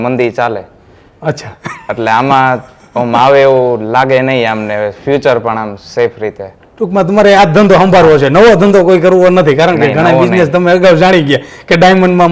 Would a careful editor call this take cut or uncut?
uncut